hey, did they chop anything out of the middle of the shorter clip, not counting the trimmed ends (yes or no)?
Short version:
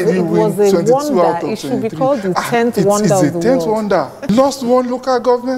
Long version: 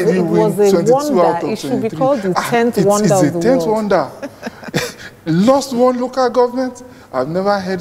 yes